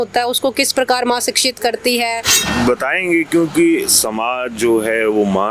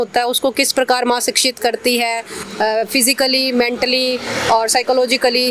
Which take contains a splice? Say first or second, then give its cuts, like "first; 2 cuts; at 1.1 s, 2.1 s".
first; 1 cut; at 2.4 s